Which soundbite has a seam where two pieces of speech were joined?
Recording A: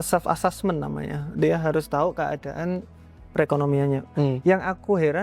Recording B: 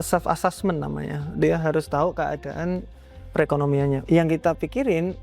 B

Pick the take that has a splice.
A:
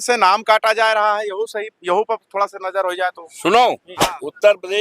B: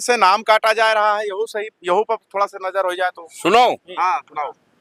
A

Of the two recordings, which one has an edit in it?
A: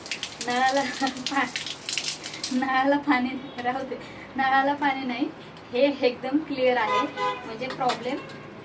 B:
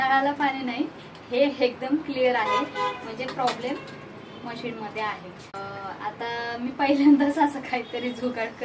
B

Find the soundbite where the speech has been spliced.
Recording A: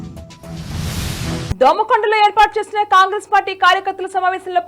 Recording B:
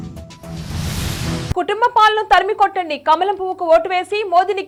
A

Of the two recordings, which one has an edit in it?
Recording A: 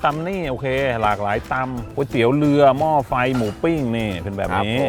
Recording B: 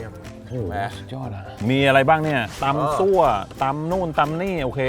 B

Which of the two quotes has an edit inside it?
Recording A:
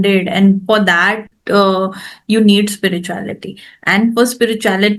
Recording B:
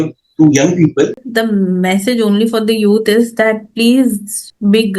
B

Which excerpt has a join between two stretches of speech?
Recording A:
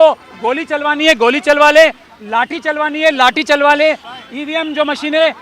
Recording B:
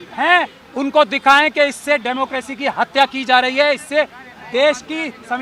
A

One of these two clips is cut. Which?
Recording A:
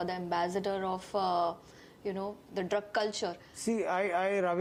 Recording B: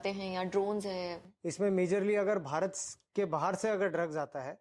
B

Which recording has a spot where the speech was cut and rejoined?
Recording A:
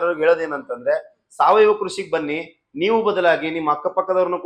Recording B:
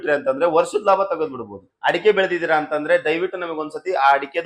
B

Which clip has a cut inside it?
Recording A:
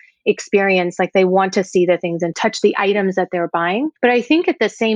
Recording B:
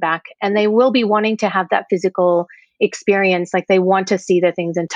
A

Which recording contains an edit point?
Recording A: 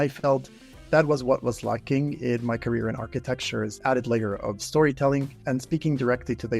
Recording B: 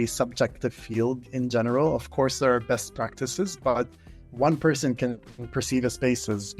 A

